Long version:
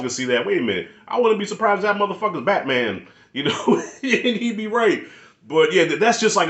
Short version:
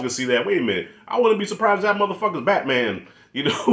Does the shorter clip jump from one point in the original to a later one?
no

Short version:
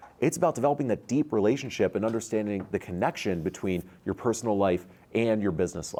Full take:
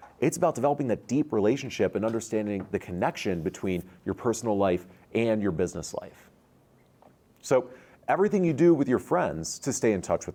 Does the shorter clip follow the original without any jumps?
yes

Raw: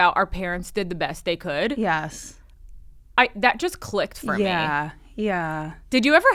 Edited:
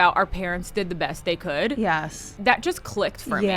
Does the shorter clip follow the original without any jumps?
no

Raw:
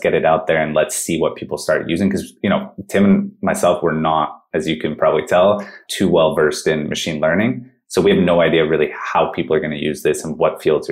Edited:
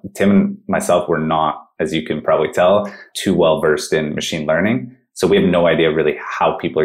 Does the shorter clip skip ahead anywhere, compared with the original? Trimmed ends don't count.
no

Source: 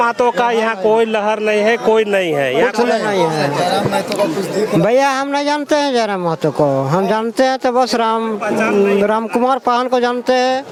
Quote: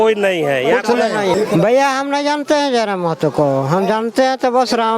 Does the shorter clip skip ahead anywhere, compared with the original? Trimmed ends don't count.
yes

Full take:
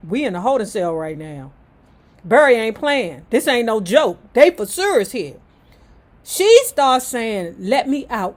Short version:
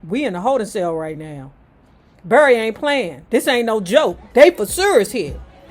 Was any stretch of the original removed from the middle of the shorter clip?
no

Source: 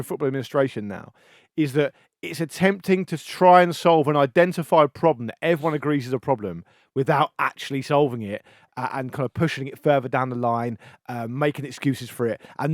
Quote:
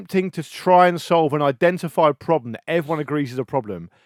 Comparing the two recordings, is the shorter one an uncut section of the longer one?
yes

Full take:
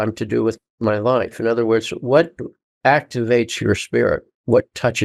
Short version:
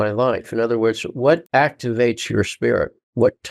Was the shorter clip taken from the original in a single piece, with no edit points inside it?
no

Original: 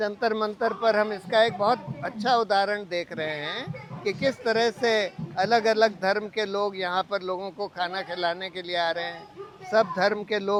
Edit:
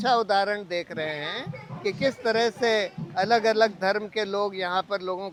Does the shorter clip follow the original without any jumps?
yes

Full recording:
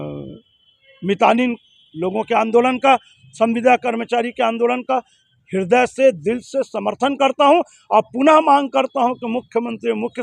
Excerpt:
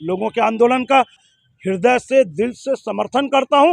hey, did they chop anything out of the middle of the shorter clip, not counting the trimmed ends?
yes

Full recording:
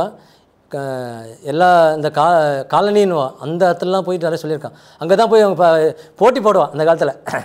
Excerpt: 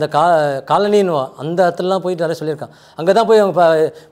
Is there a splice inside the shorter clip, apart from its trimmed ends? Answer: no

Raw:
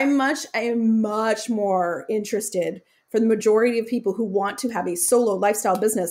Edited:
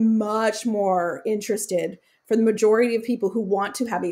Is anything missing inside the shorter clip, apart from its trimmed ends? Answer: no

